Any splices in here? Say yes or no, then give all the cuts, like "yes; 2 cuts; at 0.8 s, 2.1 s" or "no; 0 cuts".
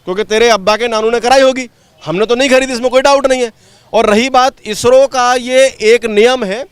no; 0 cuts